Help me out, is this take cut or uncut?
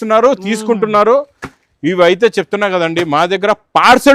uncut